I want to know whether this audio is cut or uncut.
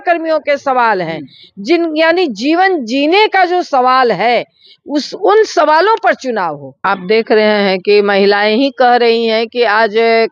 cut